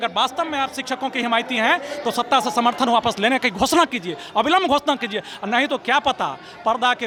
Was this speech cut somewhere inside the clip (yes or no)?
no